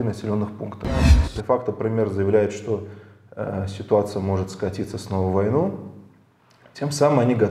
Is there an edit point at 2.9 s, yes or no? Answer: no